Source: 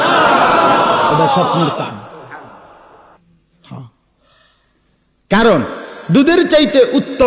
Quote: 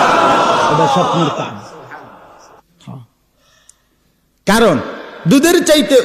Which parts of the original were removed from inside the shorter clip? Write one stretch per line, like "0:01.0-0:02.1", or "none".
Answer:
0:03.0-0:03.5